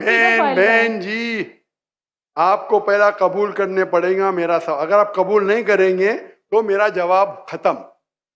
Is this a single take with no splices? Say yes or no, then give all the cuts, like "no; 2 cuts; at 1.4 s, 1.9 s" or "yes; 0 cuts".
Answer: yes; 0 cuts